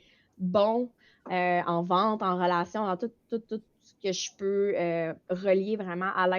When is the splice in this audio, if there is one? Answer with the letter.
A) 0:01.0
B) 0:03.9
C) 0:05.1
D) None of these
A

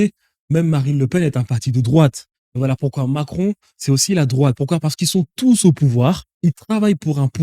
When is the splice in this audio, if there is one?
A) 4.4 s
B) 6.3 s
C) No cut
B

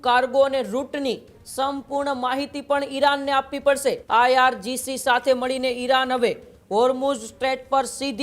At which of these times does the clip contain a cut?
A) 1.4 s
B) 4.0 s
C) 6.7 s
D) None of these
B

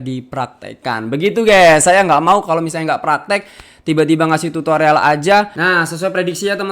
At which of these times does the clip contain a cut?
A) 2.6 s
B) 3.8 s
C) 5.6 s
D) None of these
C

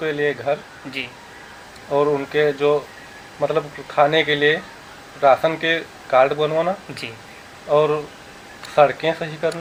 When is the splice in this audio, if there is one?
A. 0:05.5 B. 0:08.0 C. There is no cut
C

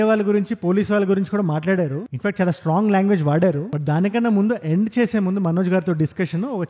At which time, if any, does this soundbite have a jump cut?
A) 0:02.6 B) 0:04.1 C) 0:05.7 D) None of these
D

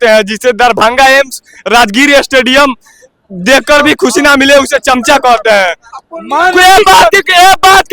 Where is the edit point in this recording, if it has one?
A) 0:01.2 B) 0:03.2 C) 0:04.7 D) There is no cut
D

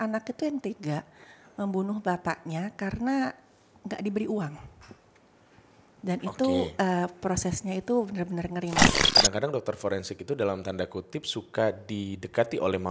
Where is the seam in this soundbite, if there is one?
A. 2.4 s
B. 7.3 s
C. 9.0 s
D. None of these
C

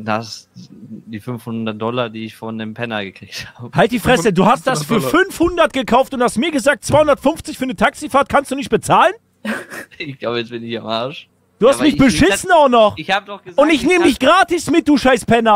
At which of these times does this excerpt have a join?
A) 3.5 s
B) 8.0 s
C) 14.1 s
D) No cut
D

